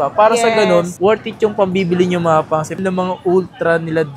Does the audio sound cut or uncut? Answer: cut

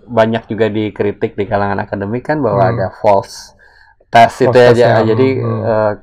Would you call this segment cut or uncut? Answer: uncut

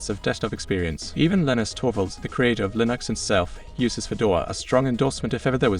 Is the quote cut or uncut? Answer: cut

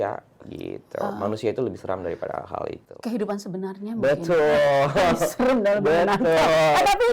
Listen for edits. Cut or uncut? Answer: uncut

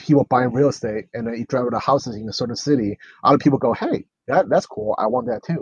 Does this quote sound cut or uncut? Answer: uncut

